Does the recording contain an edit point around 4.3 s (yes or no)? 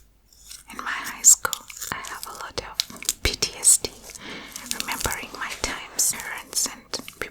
no